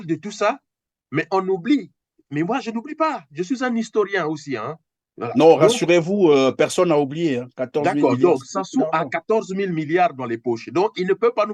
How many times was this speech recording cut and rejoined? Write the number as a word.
zero